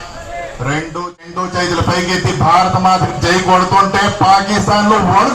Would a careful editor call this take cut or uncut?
cut